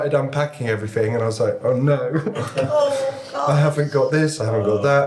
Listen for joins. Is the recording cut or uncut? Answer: uncut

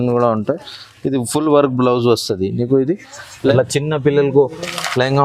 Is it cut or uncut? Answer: cut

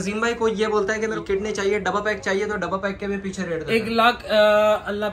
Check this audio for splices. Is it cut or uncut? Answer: cut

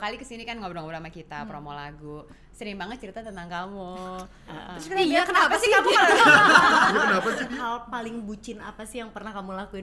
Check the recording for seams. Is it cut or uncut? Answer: cut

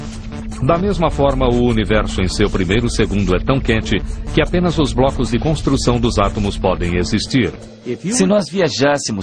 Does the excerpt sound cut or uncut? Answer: uncut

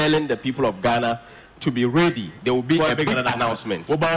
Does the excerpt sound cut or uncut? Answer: uncut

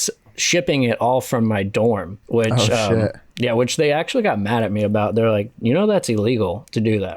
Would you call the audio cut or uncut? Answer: cut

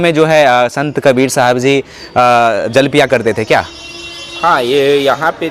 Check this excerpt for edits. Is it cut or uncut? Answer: uncut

